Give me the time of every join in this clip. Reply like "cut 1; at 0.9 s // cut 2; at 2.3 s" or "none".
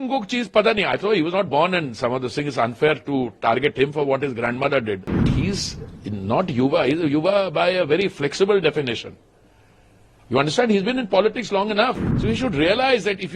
cut 1; at 5.2 s // cut 2; at 12.1 s